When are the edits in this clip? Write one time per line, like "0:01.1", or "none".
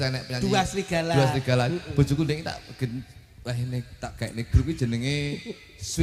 none